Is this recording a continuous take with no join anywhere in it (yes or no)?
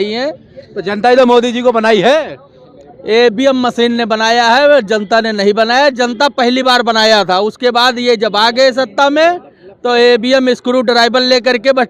yes